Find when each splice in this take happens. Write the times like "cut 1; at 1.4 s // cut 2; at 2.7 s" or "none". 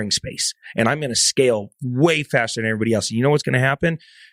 none